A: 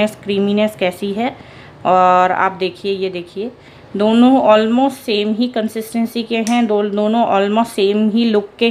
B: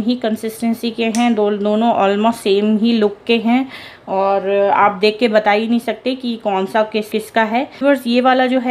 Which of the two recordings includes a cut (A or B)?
B